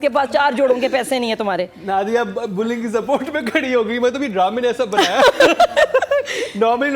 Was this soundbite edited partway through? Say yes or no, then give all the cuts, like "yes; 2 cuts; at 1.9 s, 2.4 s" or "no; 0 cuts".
no; 0 cuts